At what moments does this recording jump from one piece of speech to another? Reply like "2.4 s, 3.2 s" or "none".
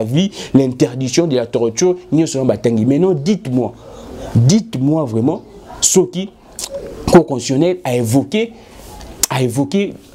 none